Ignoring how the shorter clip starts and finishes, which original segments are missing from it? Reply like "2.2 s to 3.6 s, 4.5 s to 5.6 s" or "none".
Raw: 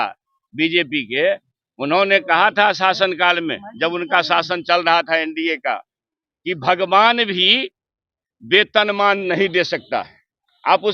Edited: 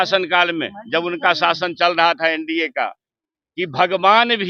none